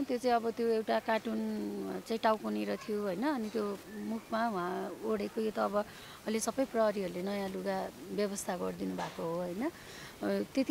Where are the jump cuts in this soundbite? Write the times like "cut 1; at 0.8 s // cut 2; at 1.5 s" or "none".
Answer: none